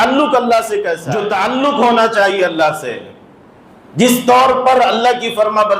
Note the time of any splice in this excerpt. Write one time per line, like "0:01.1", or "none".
0:01.1